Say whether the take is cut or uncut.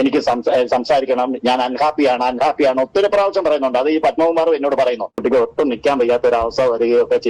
cut